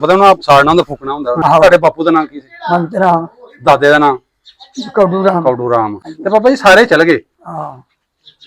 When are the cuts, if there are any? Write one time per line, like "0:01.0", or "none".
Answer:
0:01.4
0:06.1